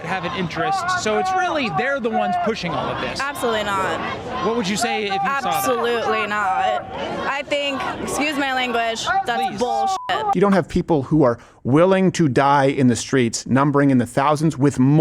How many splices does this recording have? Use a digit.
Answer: 1